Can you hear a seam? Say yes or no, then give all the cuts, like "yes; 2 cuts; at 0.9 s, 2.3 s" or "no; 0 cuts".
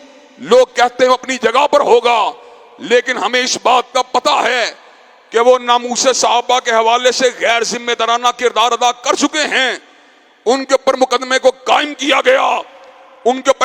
no; 0 cuts